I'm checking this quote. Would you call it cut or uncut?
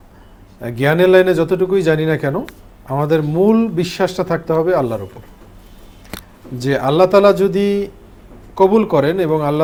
uncut